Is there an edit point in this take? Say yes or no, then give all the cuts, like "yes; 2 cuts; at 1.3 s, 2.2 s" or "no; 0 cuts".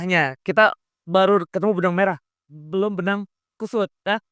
no; 0 cuts